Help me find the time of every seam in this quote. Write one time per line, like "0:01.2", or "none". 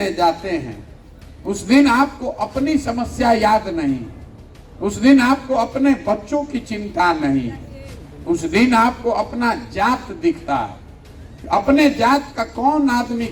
none

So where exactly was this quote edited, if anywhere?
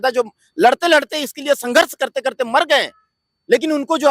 none

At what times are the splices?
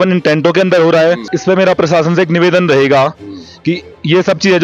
0:01.3

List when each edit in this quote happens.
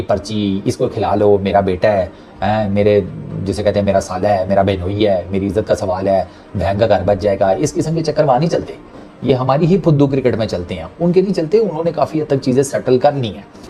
none

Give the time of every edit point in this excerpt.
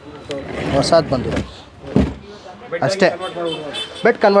0:01.8

